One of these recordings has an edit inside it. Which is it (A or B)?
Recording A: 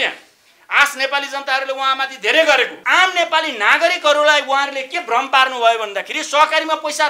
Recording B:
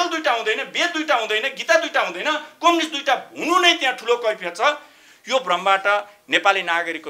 A